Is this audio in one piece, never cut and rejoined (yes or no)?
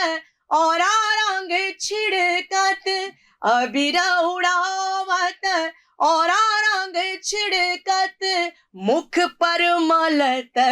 yes